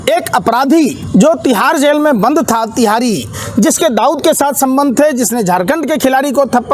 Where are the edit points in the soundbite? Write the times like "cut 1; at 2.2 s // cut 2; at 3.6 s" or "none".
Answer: cut 1; at 1.0 s

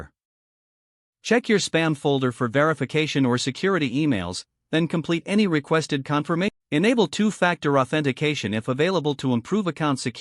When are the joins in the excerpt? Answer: cut 1; at 6.5 s

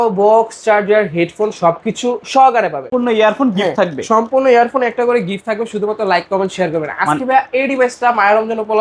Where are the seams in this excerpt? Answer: cut 1; at 2.9 s

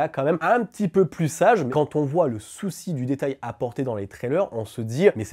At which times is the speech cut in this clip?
cut 1; at 1.7 s

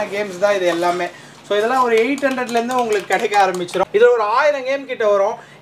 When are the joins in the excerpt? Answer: cut 1; at 3.8 s

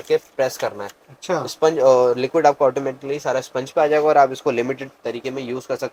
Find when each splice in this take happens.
none

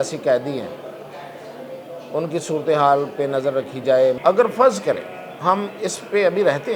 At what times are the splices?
cut 1; at 4.2 s

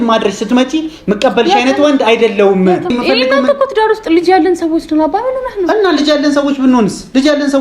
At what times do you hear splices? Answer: cut 1; at 2.9 s

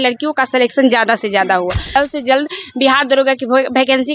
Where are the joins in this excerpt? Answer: cut 1; at 2.0 s

